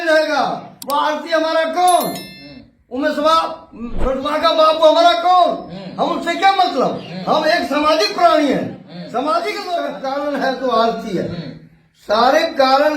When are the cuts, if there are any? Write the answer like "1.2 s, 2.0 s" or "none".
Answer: 9.9 s